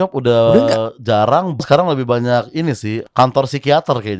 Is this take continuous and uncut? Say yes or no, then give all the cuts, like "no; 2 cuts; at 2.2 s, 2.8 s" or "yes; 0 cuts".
no; 2 cuts; at 1.6 s, 2.9 s